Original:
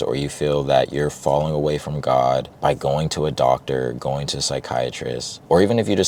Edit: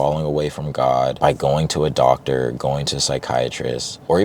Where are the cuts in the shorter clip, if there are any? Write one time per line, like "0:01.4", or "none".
0:01.1